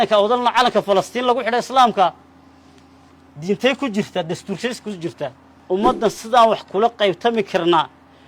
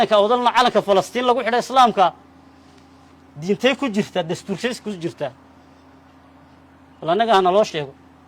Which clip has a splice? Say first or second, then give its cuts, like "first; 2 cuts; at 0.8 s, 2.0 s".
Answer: first; 1 cut; at 5.5 s